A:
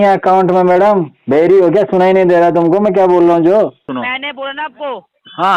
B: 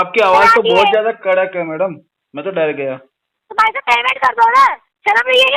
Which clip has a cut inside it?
A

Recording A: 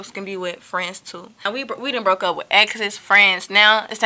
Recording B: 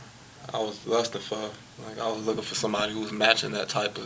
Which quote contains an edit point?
A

